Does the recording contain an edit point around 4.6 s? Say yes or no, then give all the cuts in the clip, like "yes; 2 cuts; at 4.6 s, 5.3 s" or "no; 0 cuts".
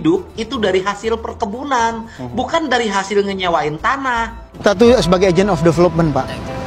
yes; 1 cut; at 4.6 s